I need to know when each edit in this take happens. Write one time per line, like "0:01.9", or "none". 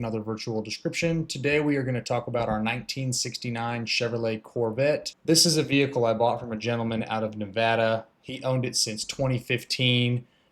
0:05.1